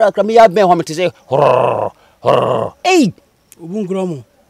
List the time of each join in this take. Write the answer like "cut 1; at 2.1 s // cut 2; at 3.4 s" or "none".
cut 1; at 2.7 s